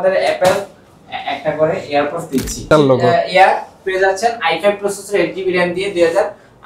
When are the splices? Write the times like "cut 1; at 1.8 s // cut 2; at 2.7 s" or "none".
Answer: cut 1; at 2.7 s

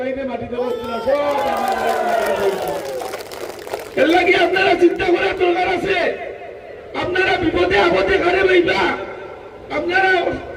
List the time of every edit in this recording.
none

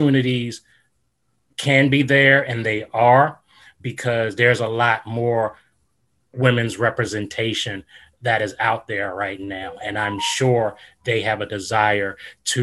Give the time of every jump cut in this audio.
none

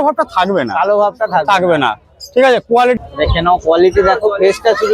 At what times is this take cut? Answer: cut 1; at 3.0 s

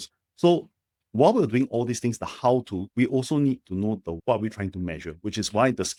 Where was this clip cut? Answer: none

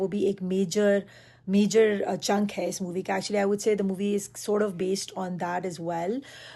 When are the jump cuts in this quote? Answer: none

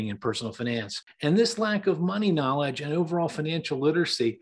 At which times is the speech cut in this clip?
cut 1; at 1.0 s

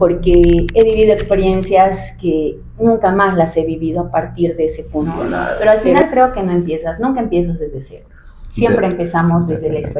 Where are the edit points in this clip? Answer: cut 1; at 5.6 s

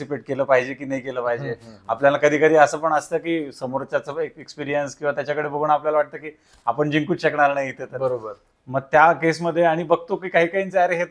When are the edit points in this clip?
none

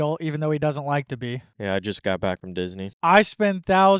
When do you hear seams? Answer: none

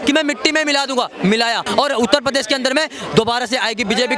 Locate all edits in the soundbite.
cut 1; at 1.6 s

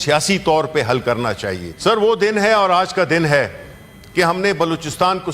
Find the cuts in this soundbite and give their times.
cut 1; at 1.7 s

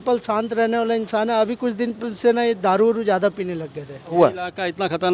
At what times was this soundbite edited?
cut 1; at 4.1 s

